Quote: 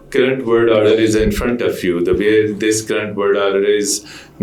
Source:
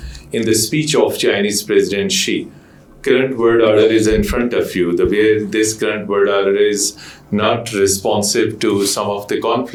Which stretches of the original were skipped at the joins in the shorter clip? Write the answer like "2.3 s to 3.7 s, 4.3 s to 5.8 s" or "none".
none